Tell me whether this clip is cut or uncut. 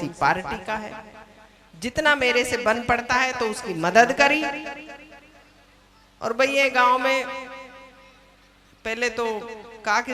uncut